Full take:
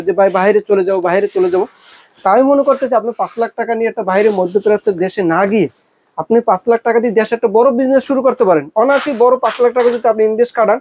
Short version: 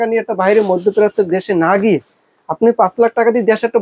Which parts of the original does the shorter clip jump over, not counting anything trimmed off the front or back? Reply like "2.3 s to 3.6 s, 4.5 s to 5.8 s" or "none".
none